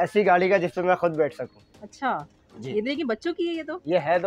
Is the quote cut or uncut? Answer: uncut